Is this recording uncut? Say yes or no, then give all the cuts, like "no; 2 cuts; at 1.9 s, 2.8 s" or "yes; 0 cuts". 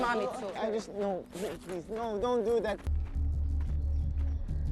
yes; 0 cuts